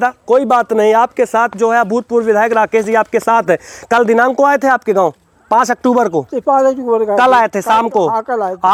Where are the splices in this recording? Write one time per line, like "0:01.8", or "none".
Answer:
none